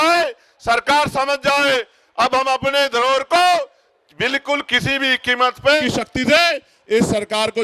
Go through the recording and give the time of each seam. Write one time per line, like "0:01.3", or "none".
0:05.8

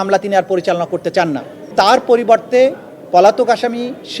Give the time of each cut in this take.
0:01.7

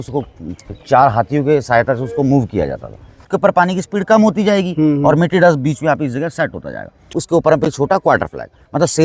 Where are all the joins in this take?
0:03.3
0:07.0

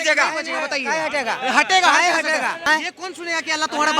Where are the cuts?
0:02.6

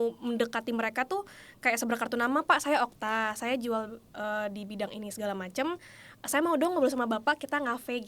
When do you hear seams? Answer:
none

